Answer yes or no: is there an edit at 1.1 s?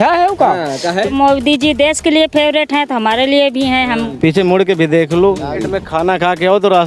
yes